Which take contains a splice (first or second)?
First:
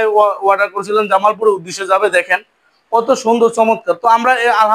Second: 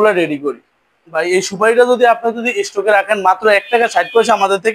second